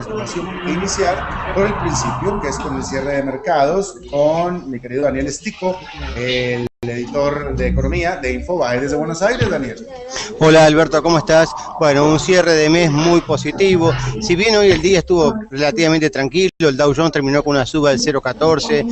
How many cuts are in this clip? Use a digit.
1